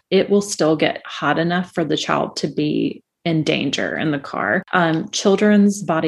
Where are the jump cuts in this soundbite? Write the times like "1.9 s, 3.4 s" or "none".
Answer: 4.7 s